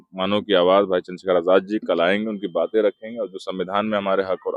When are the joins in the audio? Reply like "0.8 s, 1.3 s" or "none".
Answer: none